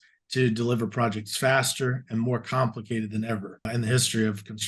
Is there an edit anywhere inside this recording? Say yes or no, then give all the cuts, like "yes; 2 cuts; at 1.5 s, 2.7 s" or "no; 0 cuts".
yes; 1 cut; at 3.7 s